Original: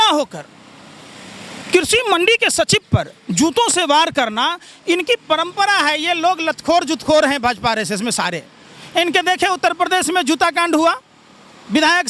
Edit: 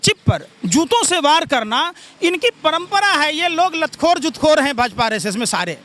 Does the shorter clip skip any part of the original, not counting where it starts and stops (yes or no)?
no